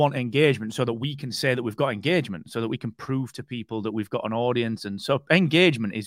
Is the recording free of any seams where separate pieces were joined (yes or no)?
yes